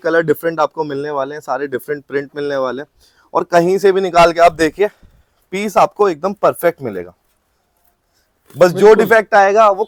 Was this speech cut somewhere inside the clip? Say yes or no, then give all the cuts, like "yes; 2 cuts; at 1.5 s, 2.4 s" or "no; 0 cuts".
no; 0 cuts